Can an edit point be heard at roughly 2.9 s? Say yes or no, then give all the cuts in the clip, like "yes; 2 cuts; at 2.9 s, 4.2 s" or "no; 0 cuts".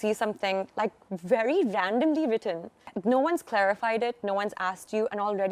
yes; 1 cut; at 2.9 s